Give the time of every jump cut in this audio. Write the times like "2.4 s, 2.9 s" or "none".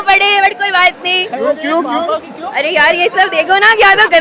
none